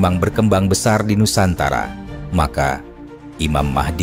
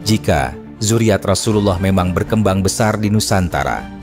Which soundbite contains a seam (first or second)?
first